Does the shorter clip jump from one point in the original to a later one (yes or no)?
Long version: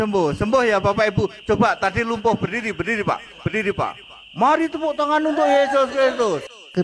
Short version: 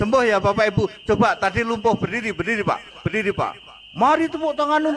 no